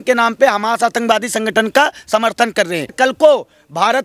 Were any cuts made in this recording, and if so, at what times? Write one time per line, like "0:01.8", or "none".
0:02.9